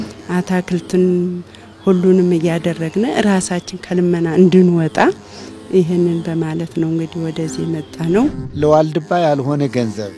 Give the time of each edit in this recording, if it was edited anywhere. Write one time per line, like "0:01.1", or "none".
0:08.4